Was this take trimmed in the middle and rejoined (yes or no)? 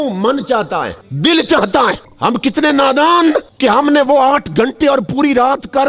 yes